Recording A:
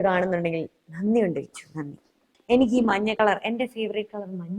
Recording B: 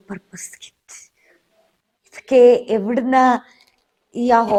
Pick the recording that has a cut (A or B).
A